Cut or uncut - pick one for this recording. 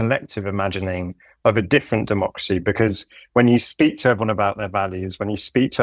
uncut